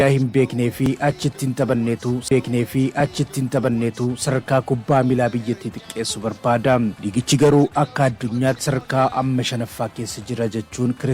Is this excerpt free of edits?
no; 1 cut; at 2.2 s

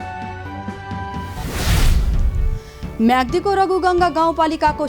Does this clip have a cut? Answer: yes; 1 cut; at 2.2 s

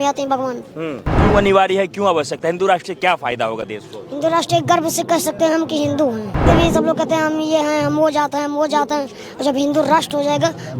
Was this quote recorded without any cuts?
no; 2 cuts; at 1.1 s, 6.4 s

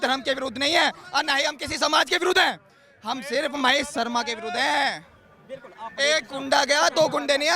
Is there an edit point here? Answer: no; 0 cuts

